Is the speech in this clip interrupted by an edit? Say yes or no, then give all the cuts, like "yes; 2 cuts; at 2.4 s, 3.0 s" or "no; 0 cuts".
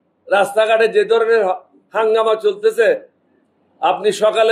no; 0 cuts